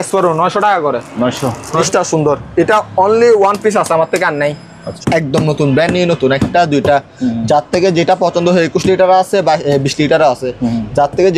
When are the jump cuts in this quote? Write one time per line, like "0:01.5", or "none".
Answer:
0:01.8
0:04.9